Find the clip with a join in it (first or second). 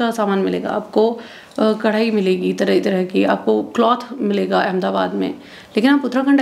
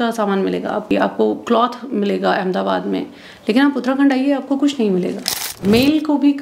second